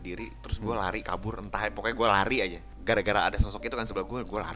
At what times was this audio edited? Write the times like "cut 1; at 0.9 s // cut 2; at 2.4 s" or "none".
cut 1; at 2.7 s